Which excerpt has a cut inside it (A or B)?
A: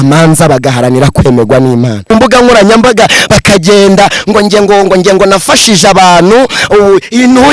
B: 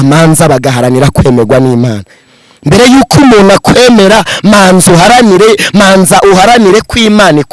A